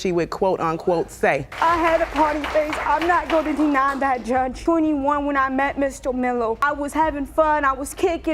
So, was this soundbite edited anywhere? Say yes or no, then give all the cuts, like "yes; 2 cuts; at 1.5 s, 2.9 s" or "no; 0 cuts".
yes; 1 cut; at 1.5 s